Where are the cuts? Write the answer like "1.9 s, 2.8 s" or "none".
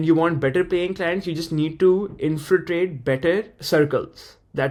none